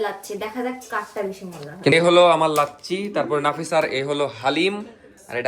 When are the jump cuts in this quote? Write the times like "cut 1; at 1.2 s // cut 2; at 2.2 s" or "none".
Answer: cut 1; at 1.9 s